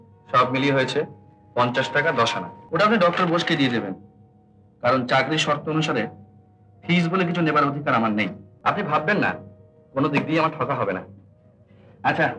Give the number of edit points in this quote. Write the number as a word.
two